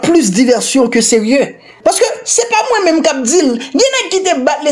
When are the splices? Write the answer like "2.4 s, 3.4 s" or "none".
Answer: 1.6 s